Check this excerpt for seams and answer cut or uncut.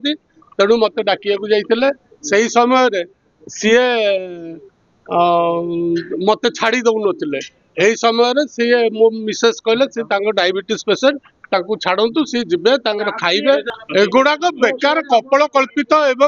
cut